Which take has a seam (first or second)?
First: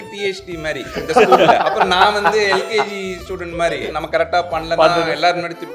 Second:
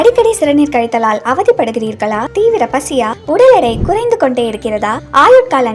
first